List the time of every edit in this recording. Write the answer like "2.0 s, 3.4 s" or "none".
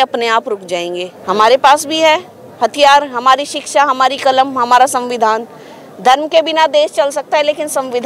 1.1 s